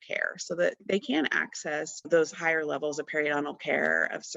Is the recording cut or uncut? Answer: cut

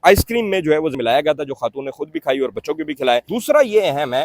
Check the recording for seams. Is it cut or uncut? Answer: cut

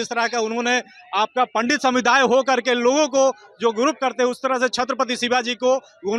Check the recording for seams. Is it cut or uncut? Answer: uncut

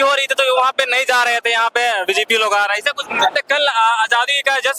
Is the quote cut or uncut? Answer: cut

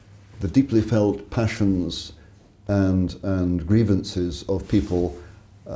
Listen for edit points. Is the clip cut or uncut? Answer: uncut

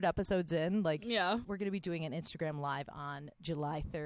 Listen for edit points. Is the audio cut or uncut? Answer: cut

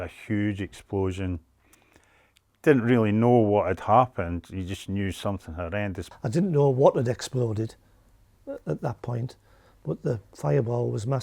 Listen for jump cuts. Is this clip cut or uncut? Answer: cut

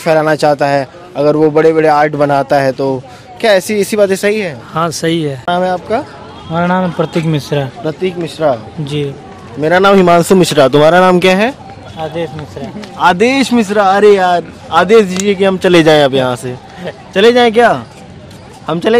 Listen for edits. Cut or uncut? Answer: cut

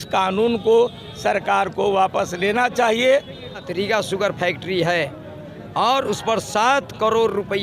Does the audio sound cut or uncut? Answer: cut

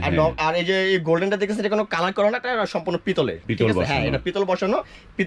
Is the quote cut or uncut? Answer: uncut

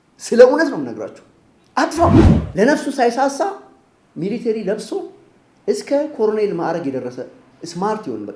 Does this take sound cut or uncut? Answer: cut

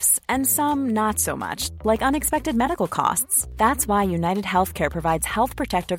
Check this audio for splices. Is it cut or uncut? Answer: uncut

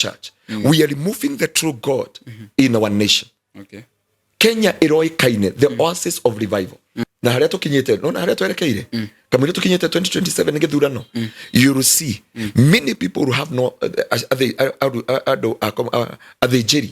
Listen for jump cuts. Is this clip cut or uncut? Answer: cut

